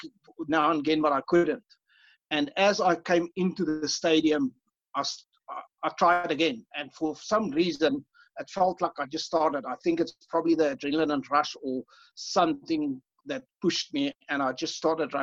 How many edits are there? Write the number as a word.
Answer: zero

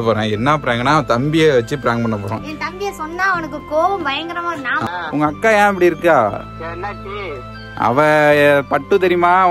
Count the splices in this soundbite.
two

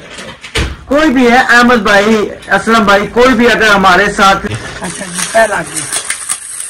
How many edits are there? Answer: one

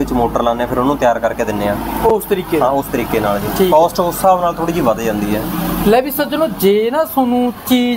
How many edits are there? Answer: zero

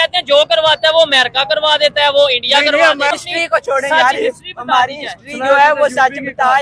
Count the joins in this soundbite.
one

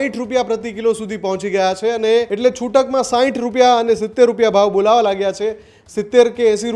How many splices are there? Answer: one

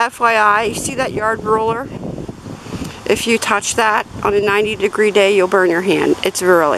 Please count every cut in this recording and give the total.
zero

